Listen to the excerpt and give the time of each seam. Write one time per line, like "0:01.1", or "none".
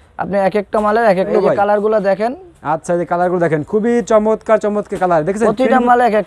0:01.3